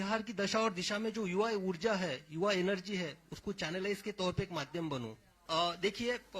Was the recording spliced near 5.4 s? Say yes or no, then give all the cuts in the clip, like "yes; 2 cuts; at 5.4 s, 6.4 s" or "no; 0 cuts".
yes; 1 cut; at 5.4 s